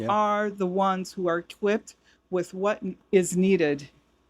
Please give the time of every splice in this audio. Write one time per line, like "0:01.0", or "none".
0:02.9